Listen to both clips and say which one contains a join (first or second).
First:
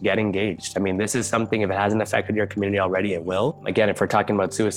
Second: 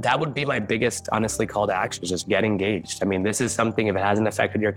first